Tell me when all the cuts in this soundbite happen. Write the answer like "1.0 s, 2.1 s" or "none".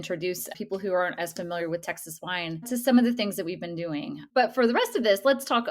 2.7 s